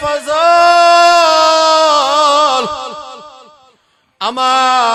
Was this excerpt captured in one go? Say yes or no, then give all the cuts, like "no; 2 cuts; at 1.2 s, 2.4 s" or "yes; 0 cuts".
yes; 0 cuts